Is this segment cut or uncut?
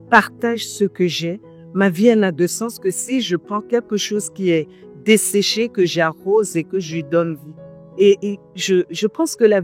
uncut